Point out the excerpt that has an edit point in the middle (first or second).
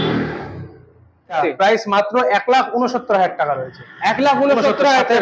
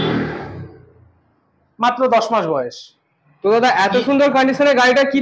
first